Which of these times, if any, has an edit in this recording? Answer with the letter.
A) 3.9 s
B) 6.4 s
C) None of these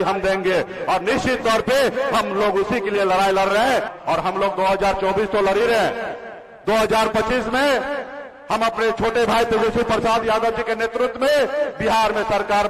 A